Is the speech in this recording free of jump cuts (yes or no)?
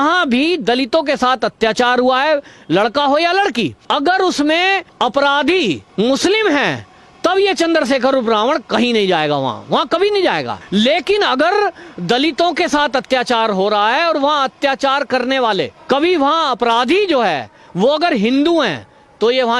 no